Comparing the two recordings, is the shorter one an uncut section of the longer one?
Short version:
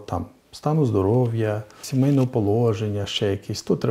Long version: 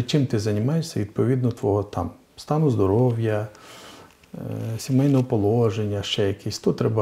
no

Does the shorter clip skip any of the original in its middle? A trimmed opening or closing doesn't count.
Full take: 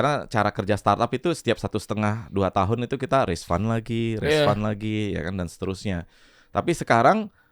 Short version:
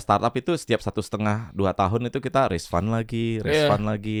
no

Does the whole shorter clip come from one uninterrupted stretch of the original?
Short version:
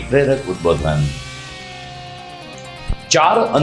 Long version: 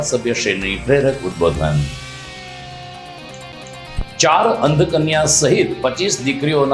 no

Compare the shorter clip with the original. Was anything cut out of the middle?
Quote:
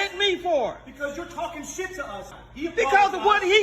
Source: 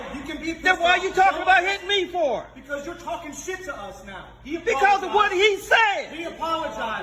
yes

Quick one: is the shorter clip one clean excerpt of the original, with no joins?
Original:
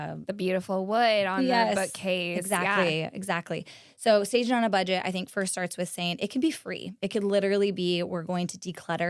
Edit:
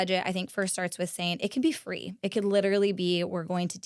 yes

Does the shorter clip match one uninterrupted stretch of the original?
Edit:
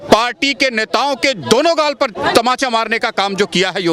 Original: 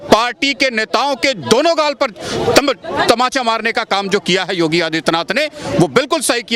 no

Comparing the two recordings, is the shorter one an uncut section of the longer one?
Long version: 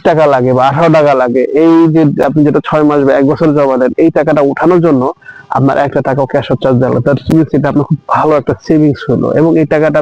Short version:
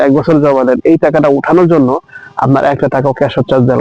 yes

